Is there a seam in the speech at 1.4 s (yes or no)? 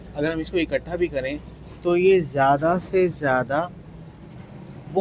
no